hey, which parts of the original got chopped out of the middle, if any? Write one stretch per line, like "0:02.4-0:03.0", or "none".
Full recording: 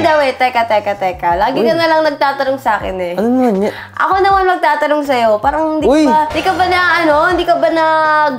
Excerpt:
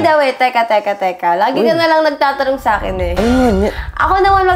none